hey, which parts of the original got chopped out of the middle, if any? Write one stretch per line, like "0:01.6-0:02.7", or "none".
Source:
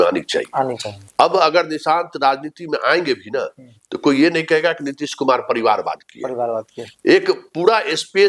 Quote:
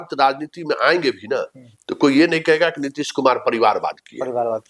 none